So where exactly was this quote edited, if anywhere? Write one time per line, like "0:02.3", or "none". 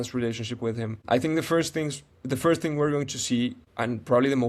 none